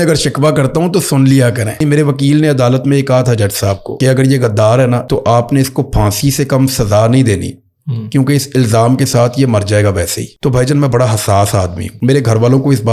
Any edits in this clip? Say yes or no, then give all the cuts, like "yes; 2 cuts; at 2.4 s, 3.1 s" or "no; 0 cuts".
yes; 5 cuts; at 1.8 s, 3.9 s, 5.0 s, 10.2 s, 11.8 s